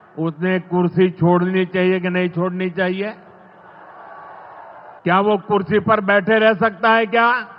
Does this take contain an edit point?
yes; 1 cut; at 5.0 s

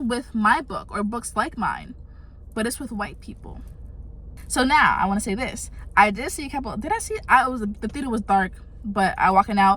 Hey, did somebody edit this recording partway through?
yes; 1 cut; at 4.4 s

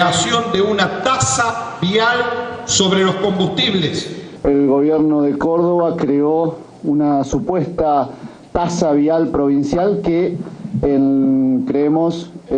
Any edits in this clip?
yes; 1 cut; at 4.3 s

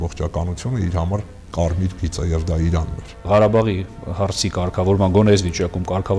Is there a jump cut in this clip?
yes; 1 cut; at 3.2 s

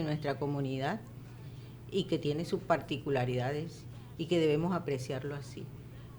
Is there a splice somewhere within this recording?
no; 0 cuts

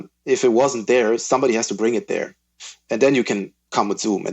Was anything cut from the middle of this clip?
yes; 1 cut; at 2.8 s

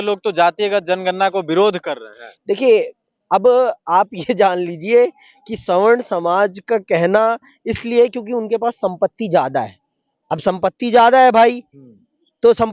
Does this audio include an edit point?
no; 0 cuts

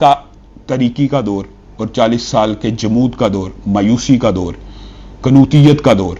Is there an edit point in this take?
no; 0 cuts

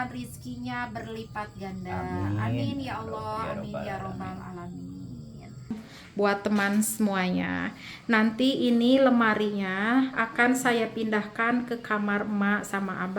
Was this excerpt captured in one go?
no; 1 cut; at 5.9 s

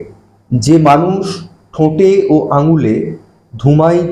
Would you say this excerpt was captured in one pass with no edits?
yes; 0 cuts

